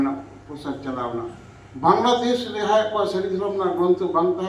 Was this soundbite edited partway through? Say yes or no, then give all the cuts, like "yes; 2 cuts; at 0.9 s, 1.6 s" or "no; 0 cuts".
no; 0 cuts